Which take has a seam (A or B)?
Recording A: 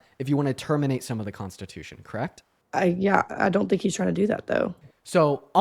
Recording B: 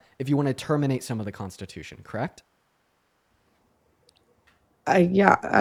A